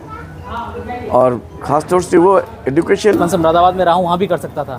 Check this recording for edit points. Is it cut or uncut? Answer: cut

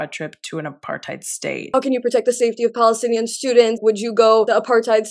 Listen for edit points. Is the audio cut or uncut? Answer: cut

